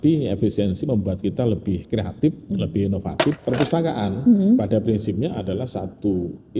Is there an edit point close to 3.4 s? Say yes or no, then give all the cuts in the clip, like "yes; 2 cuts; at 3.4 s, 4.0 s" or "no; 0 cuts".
yes; 1 cut; at 3.4 s